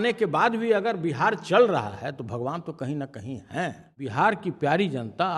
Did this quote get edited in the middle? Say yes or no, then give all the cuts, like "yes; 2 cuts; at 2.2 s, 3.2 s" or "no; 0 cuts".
yes; 1 cut; at 4.0 s